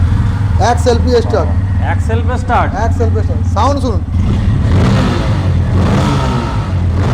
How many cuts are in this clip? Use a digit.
0